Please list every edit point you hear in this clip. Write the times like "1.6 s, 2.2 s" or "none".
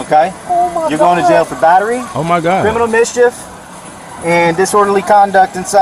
none